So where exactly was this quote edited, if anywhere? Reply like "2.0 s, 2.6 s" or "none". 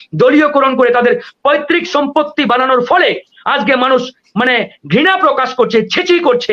none